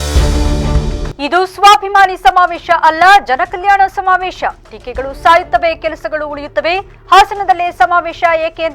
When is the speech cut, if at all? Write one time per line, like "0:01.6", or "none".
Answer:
0:01.1